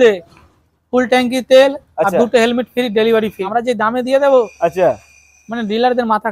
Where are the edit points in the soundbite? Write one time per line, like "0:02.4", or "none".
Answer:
0:03.4